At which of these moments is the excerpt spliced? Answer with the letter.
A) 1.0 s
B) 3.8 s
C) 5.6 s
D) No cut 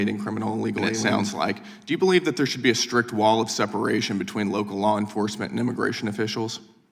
A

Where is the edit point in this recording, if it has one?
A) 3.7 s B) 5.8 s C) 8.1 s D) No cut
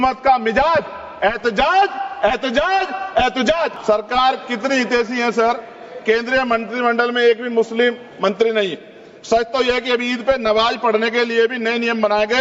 A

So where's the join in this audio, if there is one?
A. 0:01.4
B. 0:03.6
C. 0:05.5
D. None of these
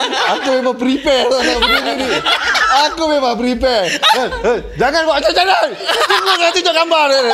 D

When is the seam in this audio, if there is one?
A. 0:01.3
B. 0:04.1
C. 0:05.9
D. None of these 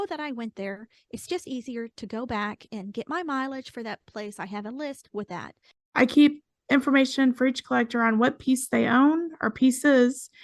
C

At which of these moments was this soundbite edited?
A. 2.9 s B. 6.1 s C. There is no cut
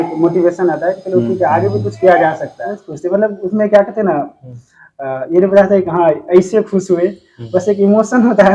A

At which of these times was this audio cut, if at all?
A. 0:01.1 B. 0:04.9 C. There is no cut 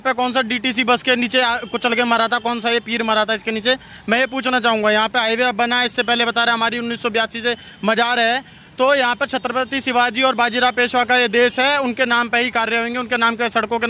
C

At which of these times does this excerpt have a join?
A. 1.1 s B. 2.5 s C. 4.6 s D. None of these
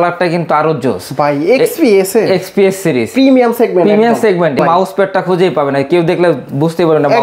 C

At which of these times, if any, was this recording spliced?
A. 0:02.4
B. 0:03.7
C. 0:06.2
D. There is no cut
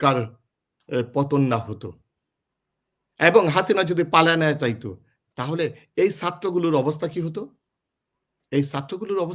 D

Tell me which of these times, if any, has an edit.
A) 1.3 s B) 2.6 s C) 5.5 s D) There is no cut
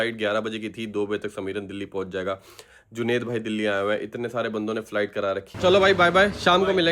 C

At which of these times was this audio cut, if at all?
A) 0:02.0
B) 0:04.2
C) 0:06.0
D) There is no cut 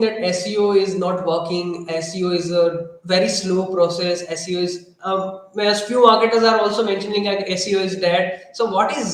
D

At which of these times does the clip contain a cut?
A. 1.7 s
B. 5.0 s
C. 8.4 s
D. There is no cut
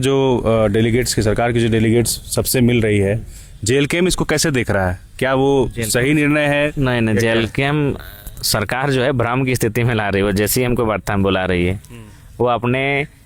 D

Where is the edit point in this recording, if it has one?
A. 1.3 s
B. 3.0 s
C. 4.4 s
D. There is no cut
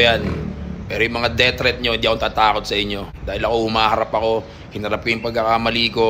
D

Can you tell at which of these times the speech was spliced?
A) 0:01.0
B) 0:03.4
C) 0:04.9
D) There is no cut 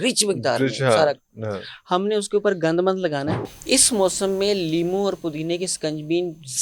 B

